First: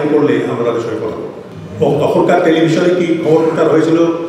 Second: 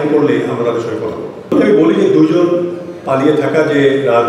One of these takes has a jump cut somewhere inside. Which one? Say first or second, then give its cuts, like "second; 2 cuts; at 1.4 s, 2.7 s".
first; 1 cut; at 1.4 s